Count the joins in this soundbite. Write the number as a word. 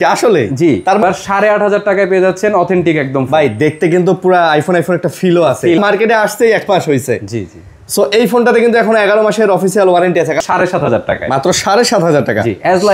three